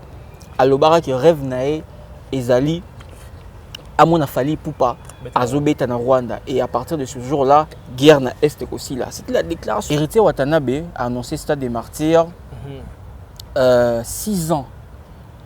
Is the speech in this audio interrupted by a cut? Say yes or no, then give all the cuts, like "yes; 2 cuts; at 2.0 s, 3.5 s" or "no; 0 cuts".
yes; 1 cut; at 9.9 s